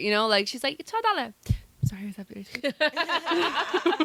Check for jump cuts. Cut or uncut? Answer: uncut